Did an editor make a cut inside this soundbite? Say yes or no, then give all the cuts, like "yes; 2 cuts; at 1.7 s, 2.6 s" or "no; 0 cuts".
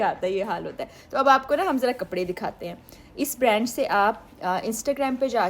no; 0 cuts